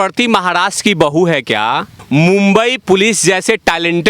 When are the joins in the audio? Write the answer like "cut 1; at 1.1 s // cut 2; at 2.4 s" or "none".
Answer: cut 1; at 1.9 s